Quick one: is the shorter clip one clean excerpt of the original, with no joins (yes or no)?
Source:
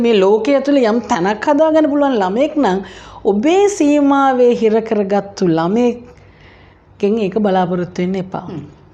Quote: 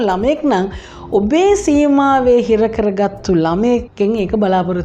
no